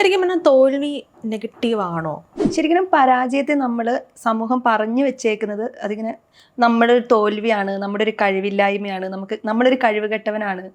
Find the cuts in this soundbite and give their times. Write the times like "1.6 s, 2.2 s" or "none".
2.3 s